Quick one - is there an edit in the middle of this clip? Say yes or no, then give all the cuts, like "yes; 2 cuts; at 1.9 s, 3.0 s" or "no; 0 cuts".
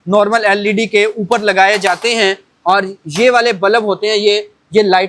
no; 0 cuts